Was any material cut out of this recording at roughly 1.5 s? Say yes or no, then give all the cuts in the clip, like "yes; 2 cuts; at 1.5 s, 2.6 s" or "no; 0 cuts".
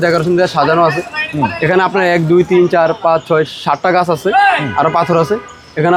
no; 0 cuts